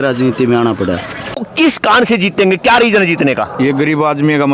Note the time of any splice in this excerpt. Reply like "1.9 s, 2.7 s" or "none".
1.4 s